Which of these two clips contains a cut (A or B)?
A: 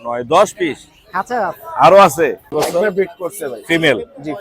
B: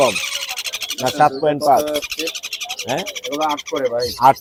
A